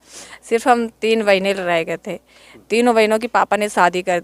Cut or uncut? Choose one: uncut